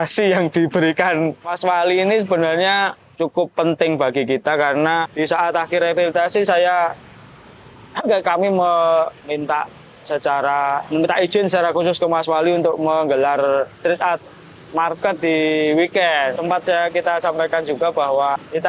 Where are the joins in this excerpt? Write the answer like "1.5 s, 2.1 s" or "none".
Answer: 5.1 s, 16.4 s

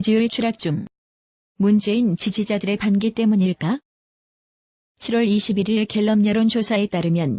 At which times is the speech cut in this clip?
none

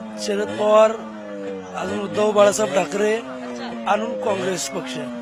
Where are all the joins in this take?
none

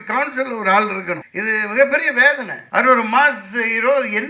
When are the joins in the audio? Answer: 1.3 s, 2.5 s

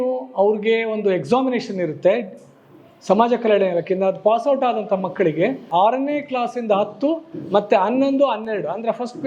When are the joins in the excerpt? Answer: 5.7 s

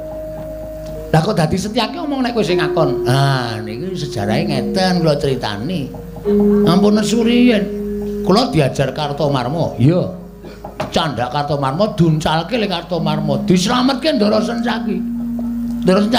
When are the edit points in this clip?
none

